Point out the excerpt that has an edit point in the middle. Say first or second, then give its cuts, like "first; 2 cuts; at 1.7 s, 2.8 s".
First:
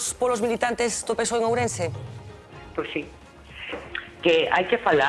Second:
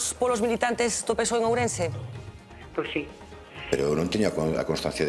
second; 1 cut; at 3.7 s